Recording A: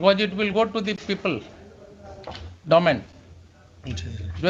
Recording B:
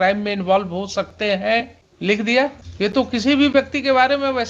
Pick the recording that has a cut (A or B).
B